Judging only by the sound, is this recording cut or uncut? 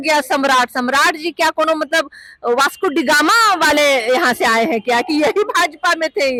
uncut